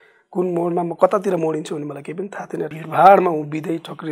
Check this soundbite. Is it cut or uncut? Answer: cut